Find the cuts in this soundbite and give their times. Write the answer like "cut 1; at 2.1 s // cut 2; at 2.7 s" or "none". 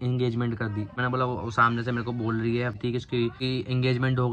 cut 1; at 2.8 s